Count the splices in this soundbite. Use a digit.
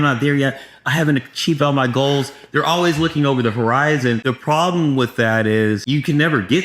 2